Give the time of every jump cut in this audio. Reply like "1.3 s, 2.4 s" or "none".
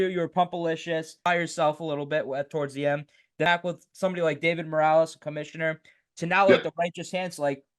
1.2 s, 3.5 s